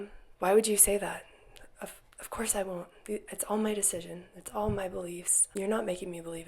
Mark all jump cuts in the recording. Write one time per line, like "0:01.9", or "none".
0:05.5